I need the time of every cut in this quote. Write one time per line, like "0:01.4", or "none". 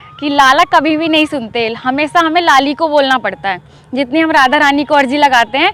none